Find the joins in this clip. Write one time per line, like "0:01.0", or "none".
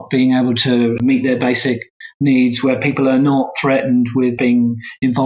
0:01.0
0:04.4